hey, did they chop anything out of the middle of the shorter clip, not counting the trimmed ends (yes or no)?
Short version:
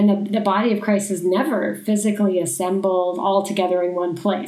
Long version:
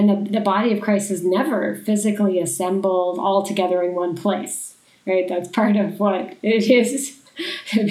no